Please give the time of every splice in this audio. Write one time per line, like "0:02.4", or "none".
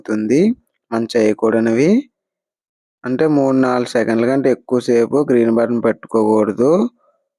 none